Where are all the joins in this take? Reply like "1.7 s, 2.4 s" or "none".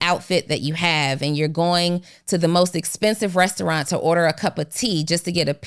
none